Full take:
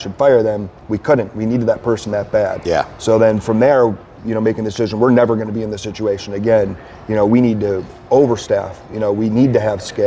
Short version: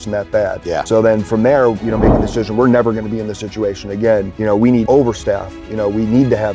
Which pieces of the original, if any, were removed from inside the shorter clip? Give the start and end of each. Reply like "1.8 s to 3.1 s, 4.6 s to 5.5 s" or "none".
2.8 s to 3.0 s, 4.0 s to 4.3 s, 7.0 s to 7.8 s